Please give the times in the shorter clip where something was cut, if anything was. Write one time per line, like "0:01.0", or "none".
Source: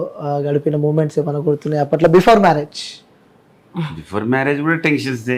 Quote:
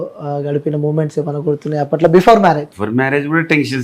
0:02.7